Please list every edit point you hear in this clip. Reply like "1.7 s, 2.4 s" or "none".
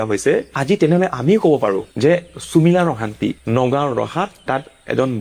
none

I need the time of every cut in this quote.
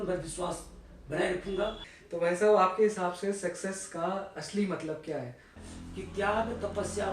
1.9 s, 5.6 s

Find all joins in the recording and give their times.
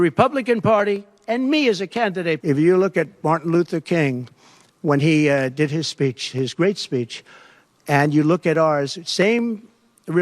2.4 s

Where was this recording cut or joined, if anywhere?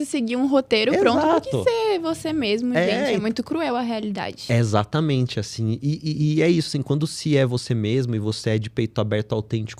none

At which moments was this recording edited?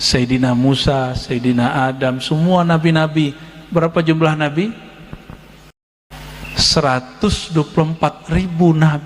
6.1 s

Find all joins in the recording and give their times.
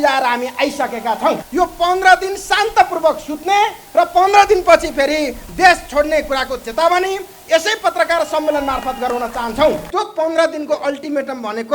1.4 s, 9.9 s

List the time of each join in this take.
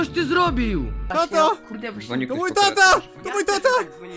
1.0 s

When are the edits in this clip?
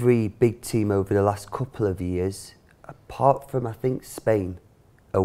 none

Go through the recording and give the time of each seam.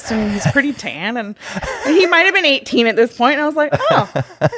none

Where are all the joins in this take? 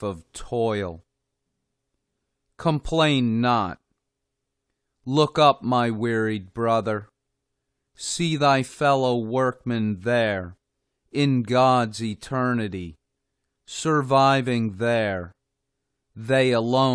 none

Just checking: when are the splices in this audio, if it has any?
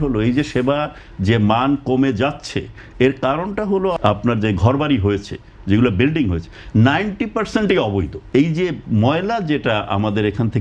4.0 s, 8.2 s

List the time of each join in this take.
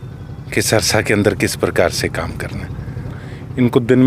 3.1 s

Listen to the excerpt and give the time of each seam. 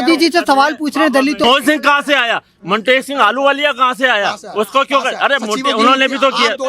1.4 s

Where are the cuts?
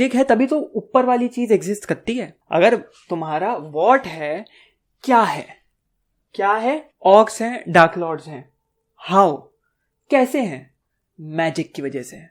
2.3 s, 6.9 s

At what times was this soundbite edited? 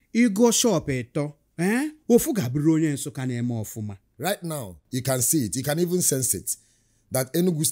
1.4 s, 4.0 s

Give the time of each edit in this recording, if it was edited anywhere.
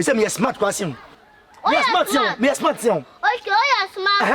none

